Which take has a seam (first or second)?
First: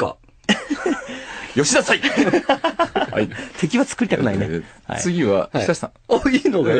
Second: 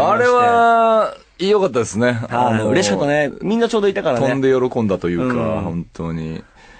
first